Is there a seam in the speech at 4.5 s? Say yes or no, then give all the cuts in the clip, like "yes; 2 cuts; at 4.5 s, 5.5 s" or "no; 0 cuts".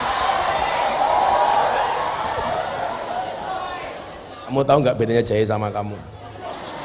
yes; 1 cut; at 4.5 s